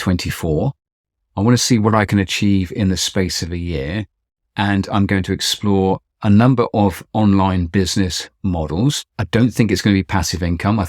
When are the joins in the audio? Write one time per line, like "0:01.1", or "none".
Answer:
0:09.1